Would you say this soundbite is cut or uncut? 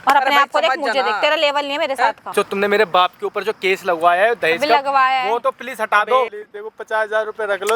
cut